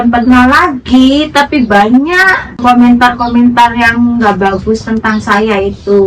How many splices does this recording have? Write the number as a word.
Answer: one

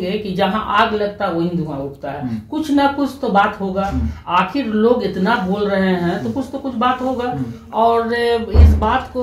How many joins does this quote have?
zero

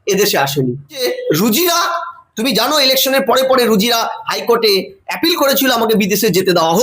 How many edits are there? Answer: one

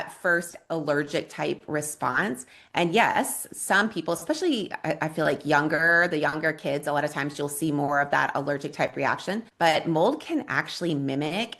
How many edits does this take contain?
one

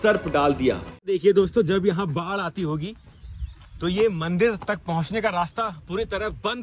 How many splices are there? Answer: one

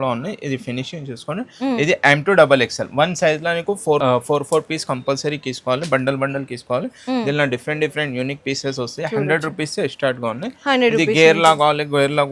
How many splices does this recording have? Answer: zero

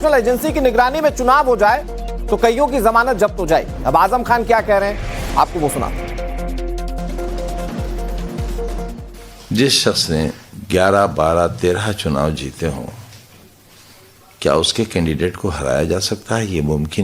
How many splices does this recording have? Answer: one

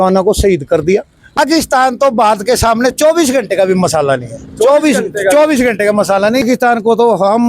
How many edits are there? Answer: two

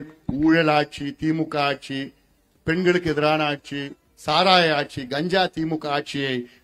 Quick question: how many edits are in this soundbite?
zero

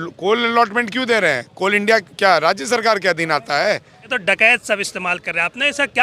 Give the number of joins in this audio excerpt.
one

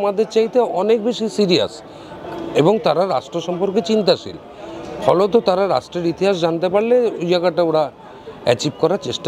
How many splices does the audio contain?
zero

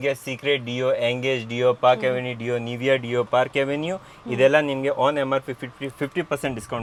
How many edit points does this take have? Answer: zero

